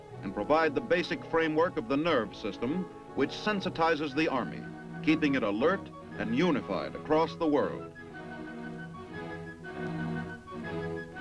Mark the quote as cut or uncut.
cut